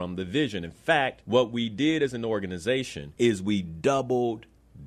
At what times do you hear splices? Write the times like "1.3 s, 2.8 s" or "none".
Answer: 1.2 s, 3.0 s